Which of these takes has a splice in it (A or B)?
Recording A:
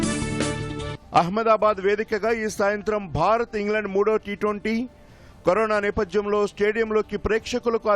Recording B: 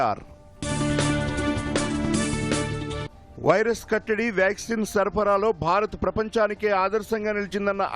A